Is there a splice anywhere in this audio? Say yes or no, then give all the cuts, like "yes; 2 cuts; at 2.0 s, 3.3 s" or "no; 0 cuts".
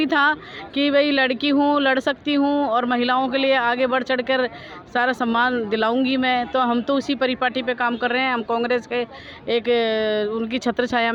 no; 0 cuts